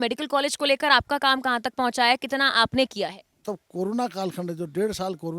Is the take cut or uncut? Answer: cut